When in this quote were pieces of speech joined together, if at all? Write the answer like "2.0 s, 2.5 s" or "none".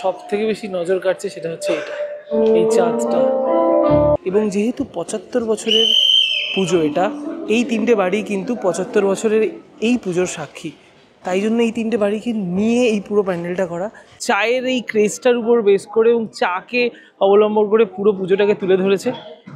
4.2 s, 14.2 s